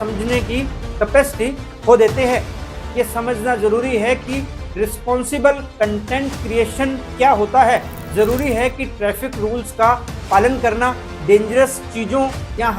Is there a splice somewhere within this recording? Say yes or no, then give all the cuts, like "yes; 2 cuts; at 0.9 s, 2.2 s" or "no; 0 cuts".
yes; 1 cut; at 2.8 s